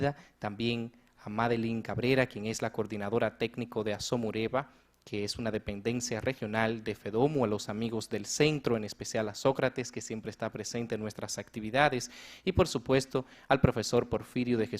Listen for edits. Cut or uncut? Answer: cut